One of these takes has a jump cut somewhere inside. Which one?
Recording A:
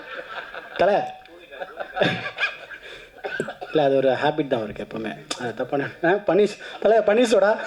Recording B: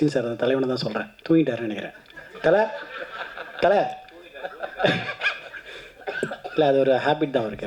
B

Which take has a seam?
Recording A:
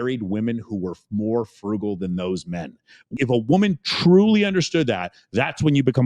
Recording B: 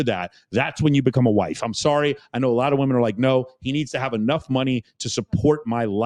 A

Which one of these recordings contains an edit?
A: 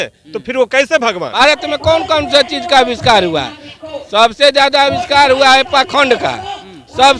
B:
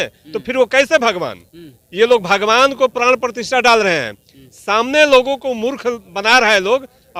A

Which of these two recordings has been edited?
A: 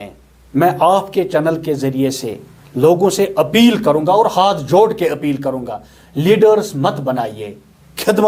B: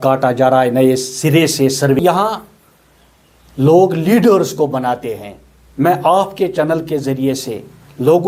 B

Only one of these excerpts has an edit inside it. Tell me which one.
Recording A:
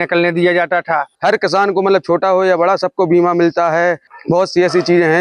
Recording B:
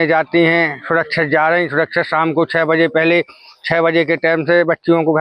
A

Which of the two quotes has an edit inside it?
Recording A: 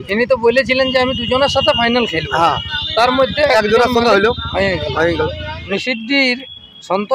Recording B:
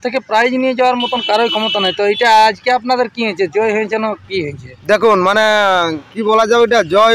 A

